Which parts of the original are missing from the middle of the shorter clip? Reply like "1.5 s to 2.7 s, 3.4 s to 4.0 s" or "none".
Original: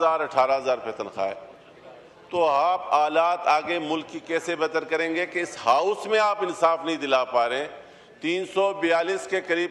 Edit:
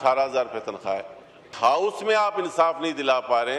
1.7 s to 5.5 s